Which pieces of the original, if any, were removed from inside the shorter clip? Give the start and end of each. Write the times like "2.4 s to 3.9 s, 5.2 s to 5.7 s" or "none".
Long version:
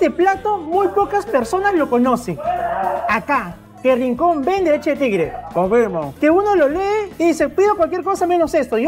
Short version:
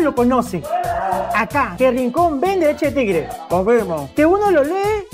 3.5 s to 3.8 s